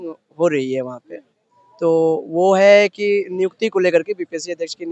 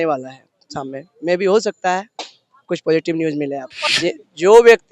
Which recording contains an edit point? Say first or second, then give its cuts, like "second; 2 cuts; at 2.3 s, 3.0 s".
second; 1 cut; at 3.7 s